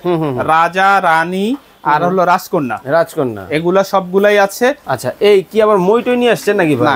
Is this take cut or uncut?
cut